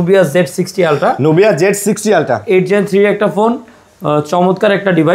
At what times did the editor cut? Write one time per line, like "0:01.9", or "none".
none